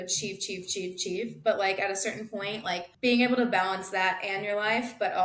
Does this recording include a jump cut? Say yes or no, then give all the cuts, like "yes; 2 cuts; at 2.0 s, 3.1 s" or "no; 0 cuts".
yes; 1 cut; at 2.9 s